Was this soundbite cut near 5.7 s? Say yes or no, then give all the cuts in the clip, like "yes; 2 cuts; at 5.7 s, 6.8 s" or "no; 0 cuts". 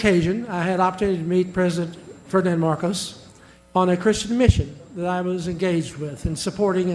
no; 0 cuts